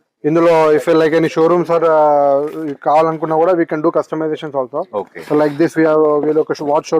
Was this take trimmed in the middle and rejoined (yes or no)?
no